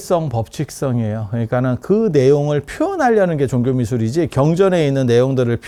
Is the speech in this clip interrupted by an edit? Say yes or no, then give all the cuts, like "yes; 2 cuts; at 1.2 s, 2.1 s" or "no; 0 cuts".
no; 0 cuts